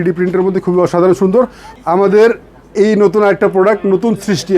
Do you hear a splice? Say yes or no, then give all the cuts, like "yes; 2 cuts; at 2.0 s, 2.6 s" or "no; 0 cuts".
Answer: yes; 1 cut; at 1.6 s